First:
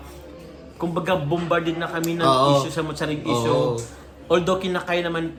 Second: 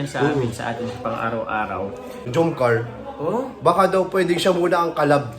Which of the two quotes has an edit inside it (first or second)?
second